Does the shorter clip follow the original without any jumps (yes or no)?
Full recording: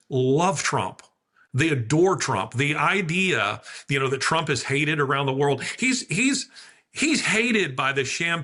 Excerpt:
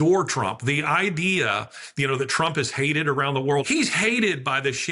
no